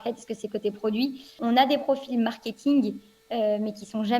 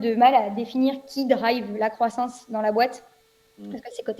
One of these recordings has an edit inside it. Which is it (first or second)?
first